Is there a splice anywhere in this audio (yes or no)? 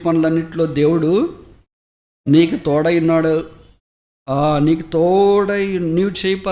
no